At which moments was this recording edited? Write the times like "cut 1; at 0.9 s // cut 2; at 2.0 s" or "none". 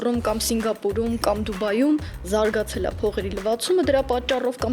none